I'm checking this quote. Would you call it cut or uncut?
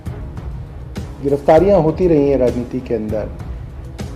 cut